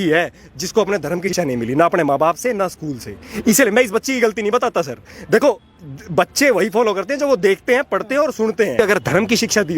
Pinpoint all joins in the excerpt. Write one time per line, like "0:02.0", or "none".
0:01.3
0:08.8